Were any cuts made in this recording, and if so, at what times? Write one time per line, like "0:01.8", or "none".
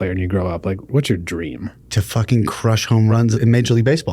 0:00.9
0:01.8
0:03.2